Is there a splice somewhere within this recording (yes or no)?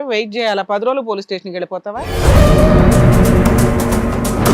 yes